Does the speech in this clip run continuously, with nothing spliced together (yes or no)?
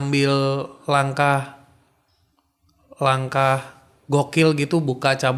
yes